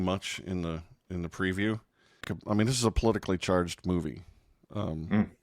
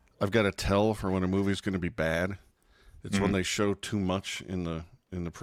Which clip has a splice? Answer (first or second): first